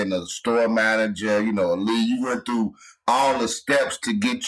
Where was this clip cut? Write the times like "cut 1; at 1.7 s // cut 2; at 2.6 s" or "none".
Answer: none